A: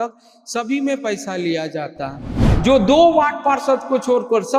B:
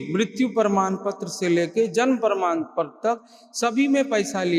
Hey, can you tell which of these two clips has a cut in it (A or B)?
A